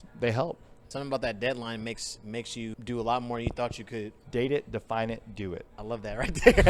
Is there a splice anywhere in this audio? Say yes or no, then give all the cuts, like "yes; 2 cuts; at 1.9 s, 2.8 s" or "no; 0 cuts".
yes; 4 cuts; at 0.9 s, 2.8 s, 4.2 s, 5.7 s